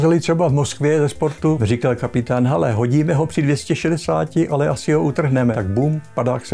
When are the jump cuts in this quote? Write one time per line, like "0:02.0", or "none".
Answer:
0:01.6
0:05.6